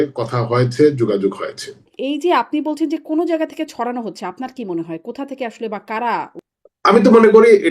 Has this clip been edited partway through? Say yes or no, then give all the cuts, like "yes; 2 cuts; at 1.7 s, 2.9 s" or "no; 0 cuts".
yes; 2 cuts; at 1.9 s, 6.5 s